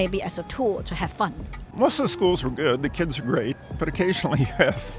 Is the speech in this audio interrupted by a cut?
yes; 1 cut; at 1.6 s

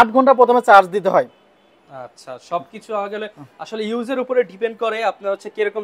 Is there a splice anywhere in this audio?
no; 0 cuts

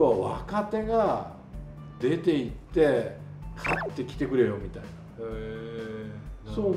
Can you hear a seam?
no; 0 cuts

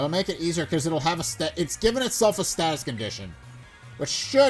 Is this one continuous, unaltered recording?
yes; 0 cuts

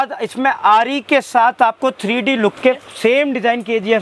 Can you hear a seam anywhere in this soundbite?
yes; 1 cut; at 2.8 s

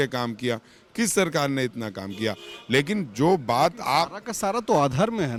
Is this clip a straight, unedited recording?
yes; 0 cuts

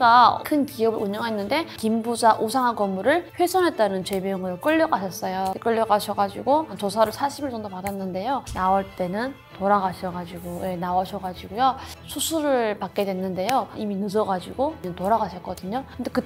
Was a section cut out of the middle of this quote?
yes; 2 cuts; at 1.7 s, 8.5 s

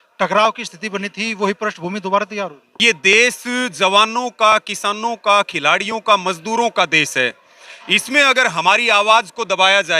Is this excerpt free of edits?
no; 1 cut; at 2.8 s

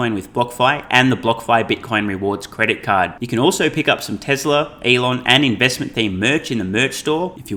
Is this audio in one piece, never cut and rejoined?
yes; 0 cuts

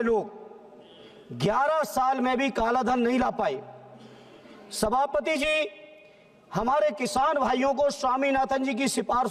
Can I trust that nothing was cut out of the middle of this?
yes; 0 cuts

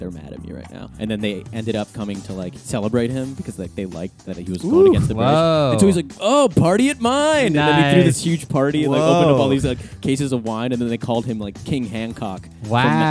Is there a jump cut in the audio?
yes; 3 cuts; at 0.9 s, 2.6 s, 4.2 s

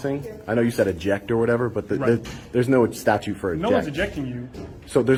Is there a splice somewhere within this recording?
no; 0 cuts

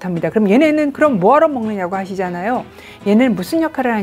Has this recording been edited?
no; 0 cuts

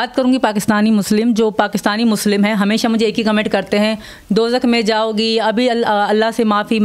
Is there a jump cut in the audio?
no; 0 cuts

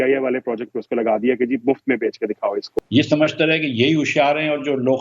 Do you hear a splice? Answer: yes; 1 cut; at 2.8 s

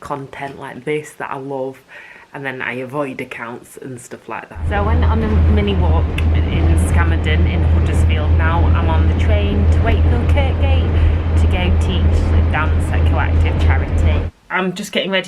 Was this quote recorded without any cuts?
no; 2 cuts; at 4.6 s, 14.3 s

